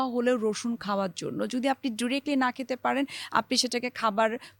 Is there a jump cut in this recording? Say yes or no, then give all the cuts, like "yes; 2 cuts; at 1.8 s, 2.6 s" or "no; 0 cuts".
no; 0 cuts